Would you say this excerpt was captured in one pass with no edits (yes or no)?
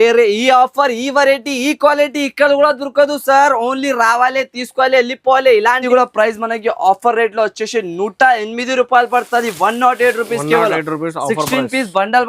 no